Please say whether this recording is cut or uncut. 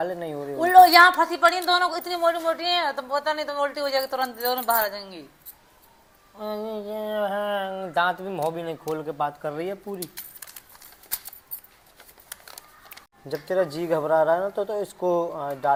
uncut